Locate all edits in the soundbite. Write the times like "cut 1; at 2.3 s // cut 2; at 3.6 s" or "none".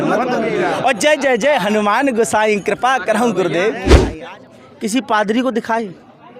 cut 1; at 4.0 s